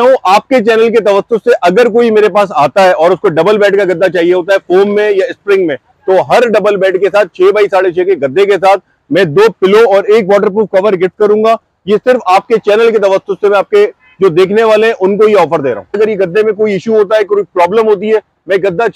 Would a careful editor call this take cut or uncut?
cut